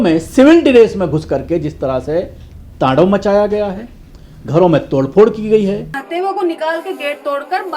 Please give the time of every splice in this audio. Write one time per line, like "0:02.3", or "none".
0:06.0